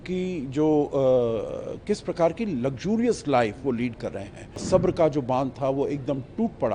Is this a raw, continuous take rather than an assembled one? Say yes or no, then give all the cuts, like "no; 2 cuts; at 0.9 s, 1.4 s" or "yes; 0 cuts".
no; 1 cut; at 4.6 s